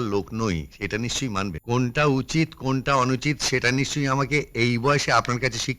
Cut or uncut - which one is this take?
cut